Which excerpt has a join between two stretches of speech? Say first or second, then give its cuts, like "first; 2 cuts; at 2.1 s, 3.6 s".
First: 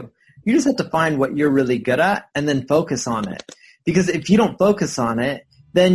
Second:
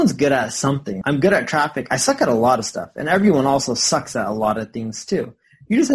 second; 1 cut; at 0.9 s